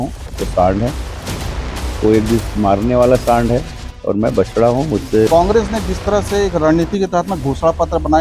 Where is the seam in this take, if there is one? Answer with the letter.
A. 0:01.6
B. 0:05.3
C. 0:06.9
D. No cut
B